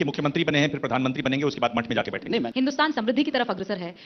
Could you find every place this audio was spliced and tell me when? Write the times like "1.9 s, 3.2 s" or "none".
2.5 s